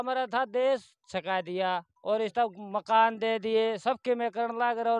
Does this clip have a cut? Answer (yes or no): no